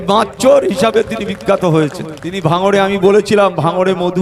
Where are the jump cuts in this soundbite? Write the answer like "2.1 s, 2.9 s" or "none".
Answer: 2.4 s